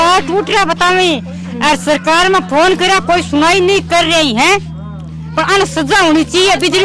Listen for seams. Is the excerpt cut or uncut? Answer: uncut